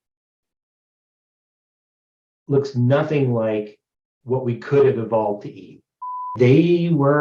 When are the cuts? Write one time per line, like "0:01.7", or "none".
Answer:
0:06.3